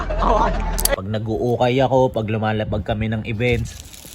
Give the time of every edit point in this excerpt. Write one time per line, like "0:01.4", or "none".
0:00.9